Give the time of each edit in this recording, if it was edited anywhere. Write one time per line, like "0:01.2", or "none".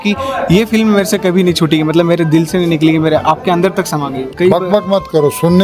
0:04.3